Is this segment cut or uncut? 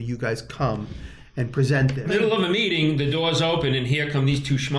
cut